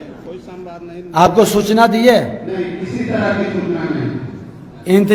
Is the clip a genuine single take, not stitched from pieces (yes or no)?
yes